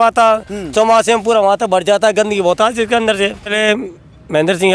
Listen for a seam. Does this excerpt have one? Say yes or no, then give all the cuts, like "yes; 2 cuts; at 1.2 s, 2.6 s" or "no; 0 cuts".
yes; 1 cut; at 3.5 s